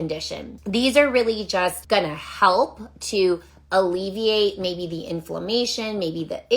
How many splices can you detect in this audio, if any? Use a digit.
1